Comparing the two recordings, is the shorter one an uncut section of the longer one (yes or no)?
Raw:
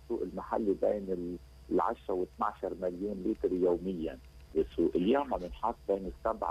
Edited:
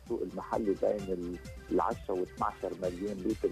yes